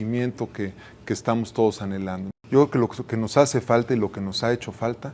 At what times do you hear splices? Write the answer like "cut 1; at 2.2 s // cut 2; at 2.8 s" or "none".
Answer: cut 1; at 2.2 s